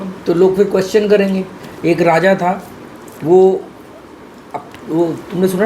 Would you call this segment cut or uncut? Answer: cut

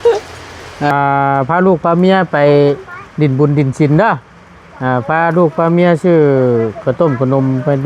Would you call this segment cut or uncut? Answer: cut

